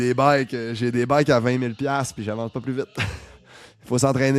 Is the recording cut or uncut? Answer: uncut